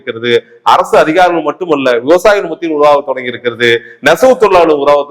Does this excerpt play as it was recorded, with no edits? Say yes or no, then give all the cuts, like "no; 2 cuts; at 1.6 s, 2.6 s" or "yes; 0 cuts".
yes; 0 cuts